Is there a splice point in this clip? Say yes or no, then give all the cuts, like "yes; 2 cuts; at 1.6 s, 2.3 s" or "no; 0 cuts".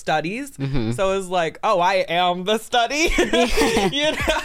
no; 0 cuts